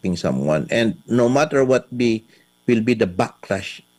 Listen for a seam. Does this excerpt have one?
no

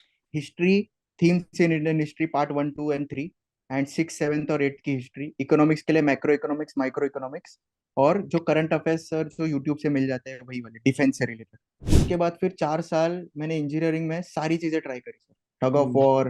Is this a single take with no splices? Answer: no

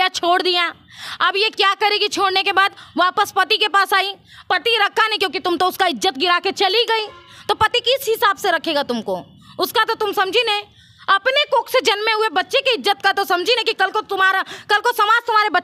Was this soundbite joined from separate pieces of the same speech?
no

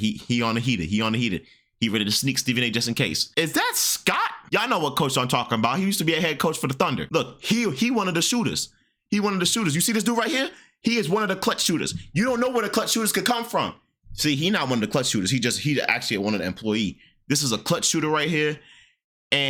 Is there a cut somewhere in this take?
no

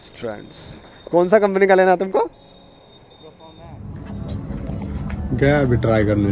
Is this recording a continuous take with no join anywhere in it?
yes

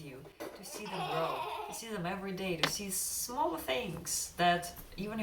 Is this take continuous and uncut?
yes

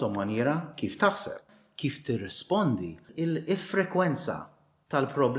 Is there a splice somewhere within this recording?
yes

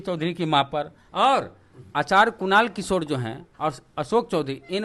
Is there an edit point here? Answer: yes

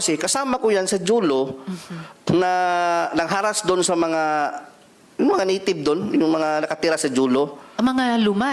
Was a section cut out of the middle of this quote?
no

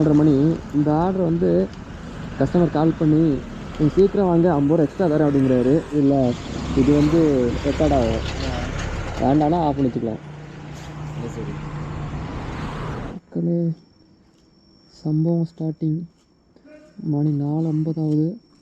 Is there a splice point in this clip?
yes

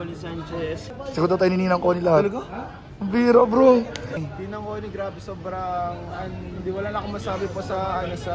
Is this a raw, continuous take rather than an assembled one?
no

